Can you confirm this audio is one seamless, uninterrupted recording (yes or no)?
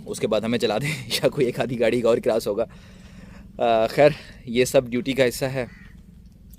yes